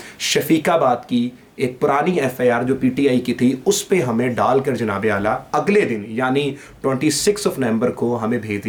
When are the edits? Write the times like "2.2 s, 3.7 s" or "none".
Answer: none